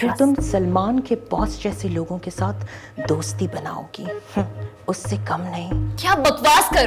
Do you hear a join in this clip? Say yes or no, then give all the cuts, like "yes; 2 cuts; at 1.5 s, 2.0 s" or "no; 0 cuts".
no; 0 cuts